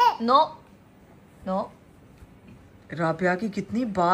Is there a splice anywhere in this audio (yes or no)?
no